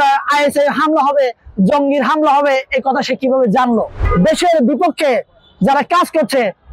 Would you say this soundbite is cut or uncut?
cut